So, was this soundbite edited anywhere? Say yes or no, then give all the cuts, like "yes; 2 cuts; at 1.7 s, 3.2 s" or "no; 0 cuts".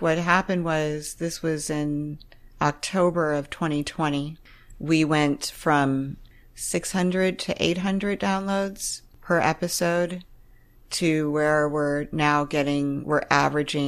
yes; 2 cuts; at 4.3 s, 6.2 s